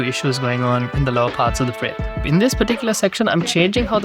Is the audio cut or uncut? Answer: cut